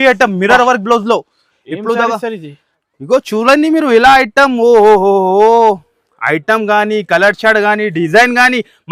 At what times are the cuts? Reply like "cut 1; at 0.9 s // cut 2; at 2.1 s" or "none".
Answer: none